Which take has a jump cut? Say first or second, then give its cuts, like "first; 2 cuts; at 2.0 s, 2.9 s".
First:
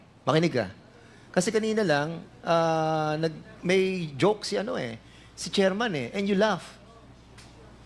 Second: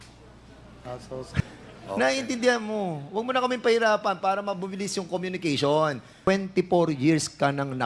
second; 2 cuts; at 1.4 s, 6.3 s